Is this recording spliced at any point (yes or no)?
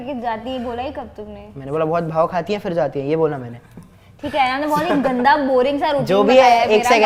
no